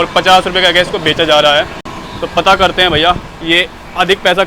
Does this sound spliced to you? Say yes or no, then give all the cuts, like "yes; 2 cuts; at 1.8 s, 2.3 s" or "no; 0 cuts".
no; 0 cuts